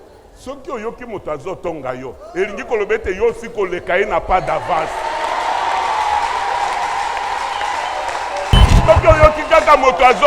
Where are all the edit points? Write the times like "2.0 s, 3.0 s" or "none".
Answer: 8.8 s